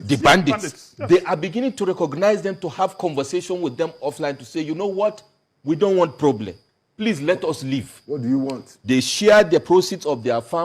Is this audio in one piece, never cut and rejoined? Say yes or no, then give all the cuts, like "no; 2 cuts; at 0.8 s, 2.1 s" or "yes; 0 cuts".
yes; 0 cuts